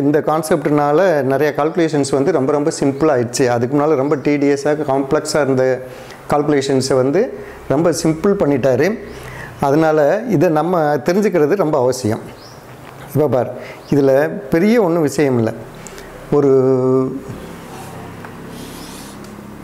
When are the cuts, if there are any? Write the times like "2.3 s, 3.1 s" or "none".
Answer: none